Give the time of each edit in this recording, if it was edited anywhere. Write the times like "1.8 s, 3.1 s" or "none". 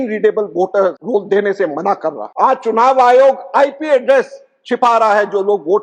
1.0 s, 2.2 s